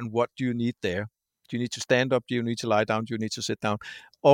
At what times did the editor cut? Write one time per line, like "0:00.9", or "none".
none